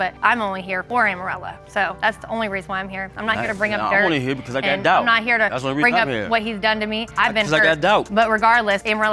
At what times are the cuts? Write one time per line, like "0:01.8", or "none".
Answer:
none